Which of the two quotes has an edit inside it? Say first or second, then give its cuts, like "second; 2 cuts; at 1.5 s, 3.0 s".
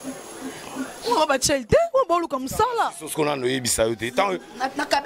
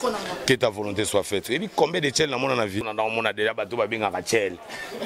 second; 1 cut; at 2.8 s